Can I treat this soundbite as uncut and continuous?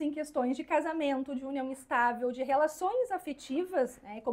yes; 0 cuts

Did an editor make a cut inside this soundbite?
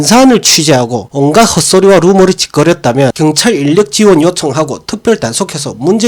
yes; 1 cut; at 3.1 s

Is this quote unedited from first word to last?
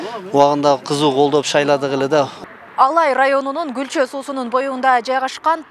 no; 1 cut; at 2.5 s

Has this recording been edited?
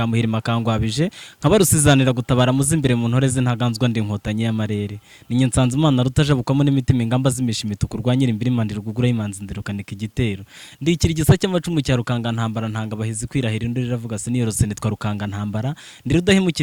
no; 0 cuts

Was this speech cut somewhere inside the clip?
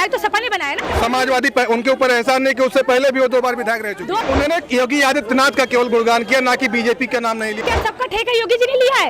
yes; 3 cuts; at 0.9 s, 4.2 s, 7.6 s

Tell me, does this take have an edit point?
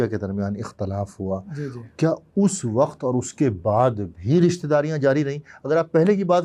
no; 0 cuts

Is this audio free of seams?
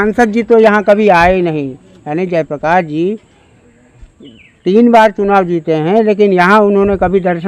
yes; 0 cuts

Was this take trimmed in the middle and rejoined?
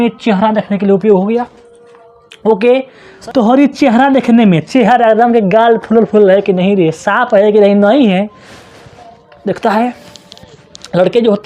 yes; 1 cut; at 3.1 s

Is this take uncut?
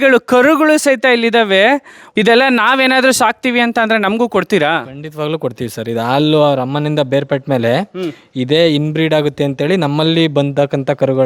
no; 1 cut; at 2.1 s

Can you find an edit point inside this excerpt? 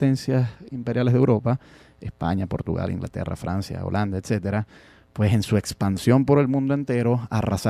yes; 1 cut; at 6.1 s

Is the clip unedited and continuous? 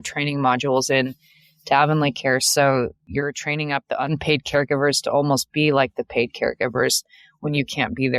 no; 1 cut; at 3.0 s

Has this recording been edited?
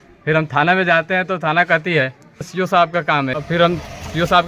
yes; 2 cuts; at 2.5 s, 3.4 s

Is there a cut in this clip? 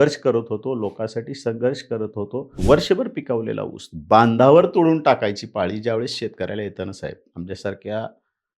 yes; 1 cut; at 2.5 s

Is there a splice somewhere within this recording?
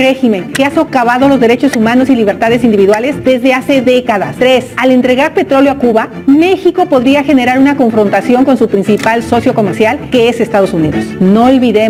no; 0 cuts

